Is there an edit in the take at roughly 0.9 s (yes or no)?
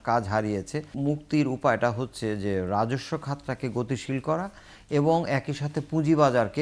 yes